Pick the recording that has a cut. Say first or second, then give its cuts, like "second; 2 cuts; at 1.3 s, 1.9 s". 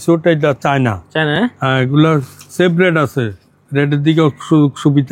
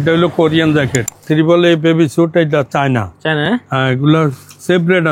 second; 1 cut; at 1.1 s